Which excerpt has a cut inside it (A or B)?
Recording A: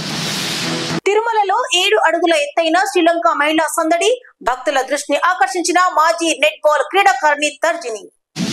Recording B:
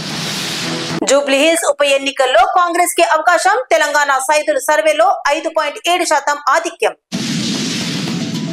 B